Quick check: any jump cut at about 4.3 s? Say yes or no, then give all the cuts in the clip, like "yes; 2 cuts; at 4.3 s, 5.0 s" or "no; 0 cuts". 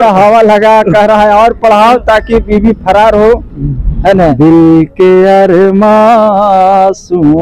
yes; 1 cut; at 4.3 s